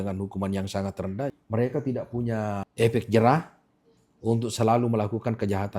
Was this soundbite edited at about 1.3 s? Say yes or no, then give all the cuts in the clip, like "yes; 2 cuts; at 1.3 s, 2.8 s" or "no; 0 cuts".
yes; 2 cuts; at 1.3 s, 2.7 s